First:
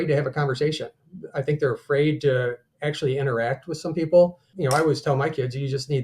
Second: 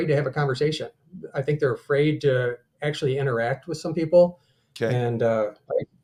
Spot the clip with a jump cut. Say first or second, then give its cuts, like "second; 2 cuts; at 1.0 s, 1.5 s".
first; 1 cut; at 4.4 s